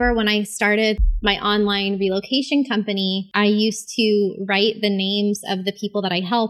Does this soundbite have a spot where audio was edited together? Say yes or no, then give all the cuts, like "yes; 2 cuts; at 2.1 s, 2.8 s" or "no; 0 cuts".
yes; 2 cuts; at 1.0 s, 3.2 s